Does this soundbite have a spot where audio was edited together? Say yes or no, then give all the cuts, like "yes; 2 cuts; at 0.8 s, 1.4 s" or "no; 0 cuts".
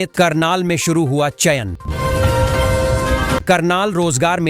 yes; 2 cuts; at 1.8 s, 3.4 s